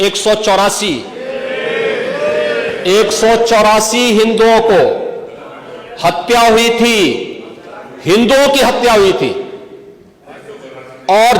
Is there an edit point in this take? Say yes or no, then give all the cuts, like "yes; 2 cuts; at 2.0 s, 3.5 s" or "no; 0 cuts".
yes; 1 cut; at 1.2 s